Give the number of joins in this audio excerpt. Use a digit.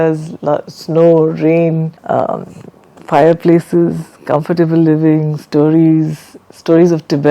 1